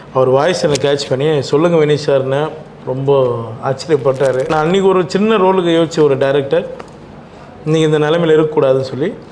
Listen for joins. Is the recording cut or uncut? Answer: cut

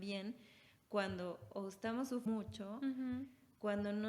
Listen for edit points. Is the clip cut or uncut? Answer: cut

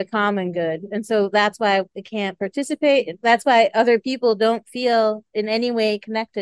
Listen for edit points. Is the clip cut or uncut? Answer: uncut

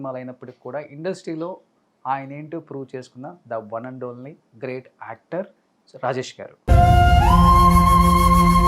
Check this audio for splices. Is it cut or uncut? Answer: uncut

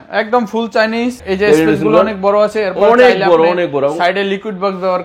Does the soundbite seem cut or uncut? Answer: cut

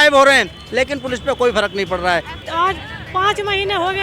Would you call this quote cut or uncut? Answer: cut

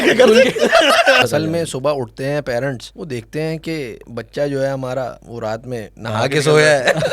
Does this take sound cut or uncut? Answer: cut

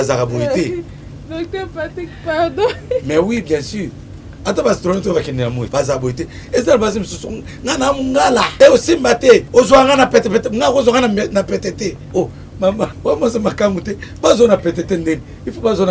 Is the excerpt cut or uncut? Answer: cut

